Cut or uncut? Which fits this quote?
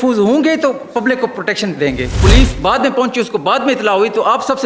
cut